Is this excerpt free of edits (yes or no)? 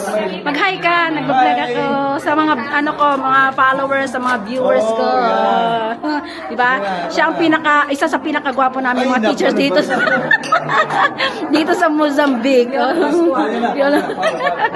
yes